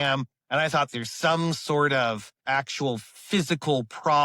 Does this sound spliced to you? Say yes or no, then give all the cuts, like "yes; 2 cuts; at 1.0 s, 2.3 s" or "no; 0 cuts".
yes; 2 cuts; at 0.9 s, 2.4 s